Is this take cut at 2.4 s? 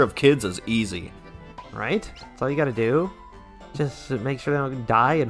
no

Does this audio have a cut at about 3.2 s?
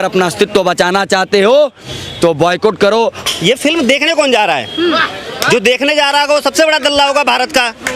yes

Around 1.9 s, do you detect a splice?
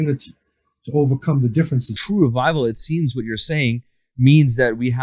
yes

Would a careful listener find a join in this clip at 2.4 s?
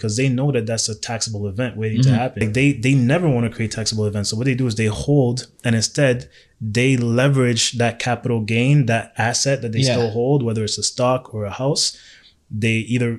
yes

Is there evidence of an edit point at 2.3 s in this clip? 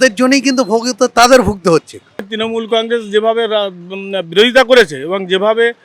yes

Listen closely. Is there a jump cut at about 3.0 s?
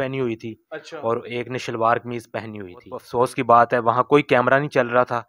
yes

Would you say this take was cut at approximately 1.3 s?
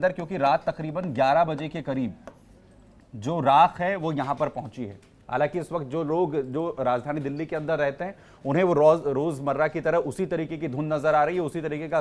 no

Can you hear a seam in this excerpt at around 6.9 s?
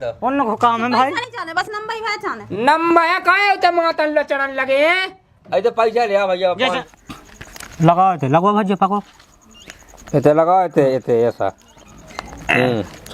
yes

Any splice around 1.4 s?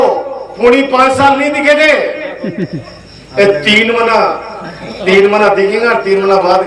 no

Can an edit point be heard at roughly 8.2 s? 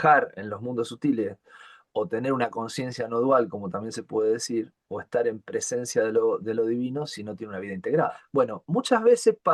yes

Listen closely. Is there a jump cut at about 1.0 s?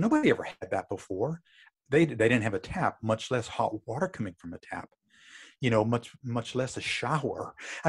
no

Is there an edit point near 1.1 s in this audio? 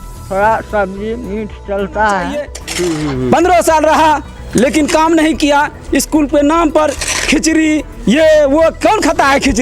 no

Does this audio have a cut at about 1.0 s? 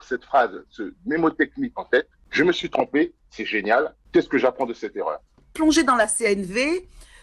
no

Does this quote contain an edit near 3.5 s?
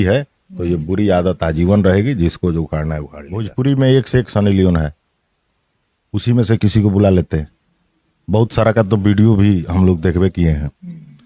yes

